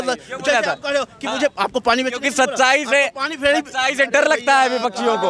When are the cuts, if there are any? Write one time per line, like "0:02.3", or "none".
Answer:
none

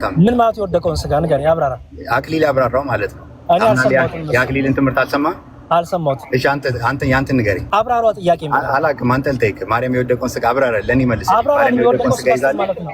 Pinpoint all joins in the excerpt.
0:07.6

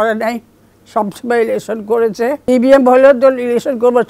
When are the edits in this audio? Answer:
0:02.4

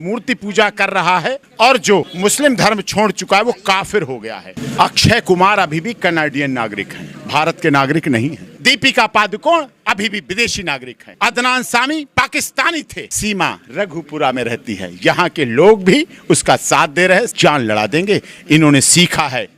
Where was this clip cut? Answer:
0:01.4
0:02.1
0:04.6
0:08.5
0:11.0
0:13.0
0:17.3

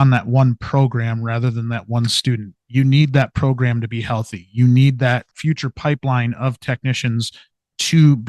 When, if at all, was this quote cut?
0:05.3

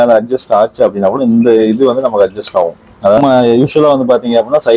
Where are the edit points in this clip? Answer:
0:03.2

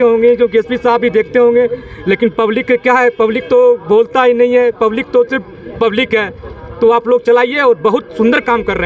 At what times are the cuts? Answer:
none

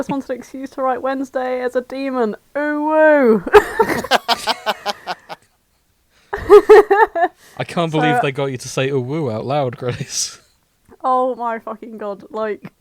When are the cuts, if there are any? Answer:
none

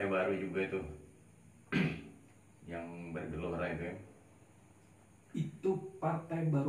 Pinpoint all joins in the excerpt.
none

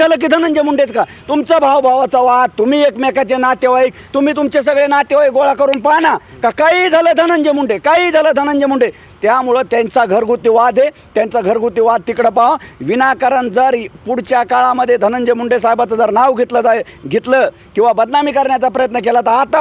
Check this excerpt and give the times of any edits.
none

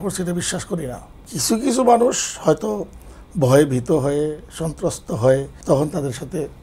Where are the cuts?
0:01.1
0:05.5

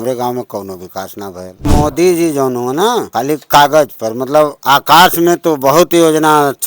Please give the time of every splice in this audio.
0:01.7
0:03.1
0:04.6

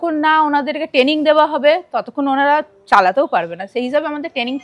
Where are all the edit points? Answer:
none

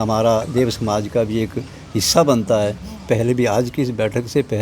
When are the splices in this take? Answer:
0:03.1

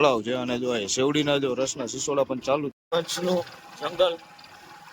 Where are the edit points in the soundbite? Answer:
0:02.7

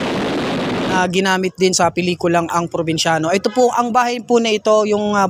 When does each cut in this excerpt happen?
0:01.0

